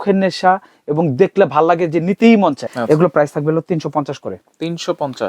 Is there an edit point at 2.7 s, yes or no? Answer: yes